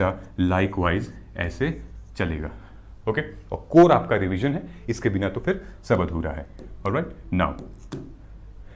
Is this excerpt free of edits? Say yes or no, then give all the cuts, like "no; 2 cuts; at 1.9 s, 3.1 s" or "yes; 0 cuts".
yes; 0 cuts